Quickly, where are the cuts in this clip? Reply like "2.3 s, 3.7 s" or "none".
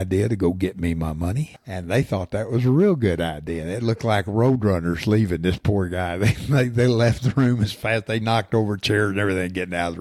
1.5 s